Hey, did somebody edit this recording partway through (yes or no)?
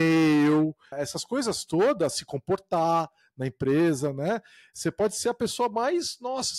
yes